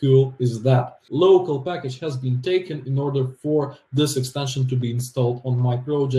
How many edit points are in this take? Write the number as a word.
one